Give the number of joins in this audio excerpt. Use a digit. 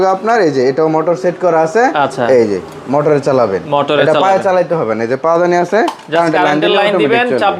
0